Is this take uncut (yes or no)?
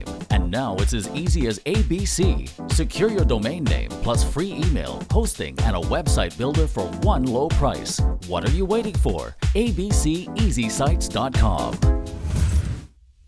no